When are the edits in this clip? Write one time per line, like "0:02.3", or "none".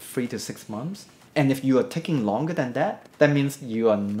0:01.1